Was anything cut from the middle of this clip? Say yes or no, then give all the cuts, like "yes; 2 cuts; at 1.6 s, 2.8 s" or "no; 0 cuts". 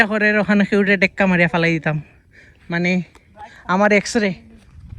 no; 0 cuts